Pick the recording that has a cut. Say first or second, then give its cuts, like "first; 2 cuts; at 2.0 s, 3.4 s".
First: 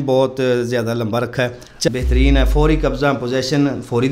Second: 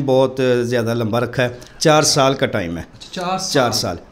first; 1 cut; at 1.9 s